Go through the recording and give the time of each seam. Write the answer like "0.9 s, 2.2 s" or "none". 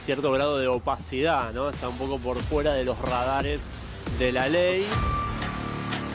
4.9 s